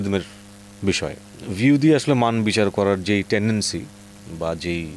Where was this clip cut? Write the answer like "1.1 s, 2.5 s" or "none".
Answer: none

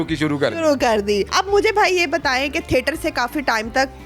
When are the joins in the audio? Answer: none

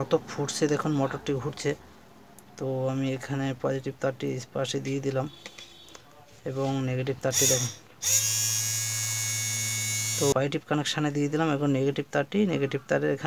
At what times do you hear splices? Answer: 10.3 s

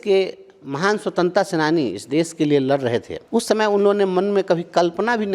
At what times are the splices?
3.2 s

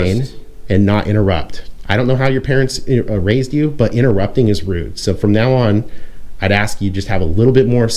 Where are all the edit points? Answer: none

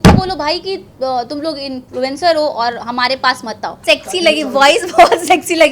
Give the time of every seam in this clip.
3.7 s

